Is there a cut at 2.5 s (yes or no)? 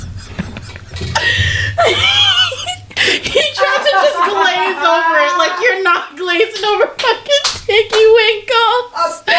no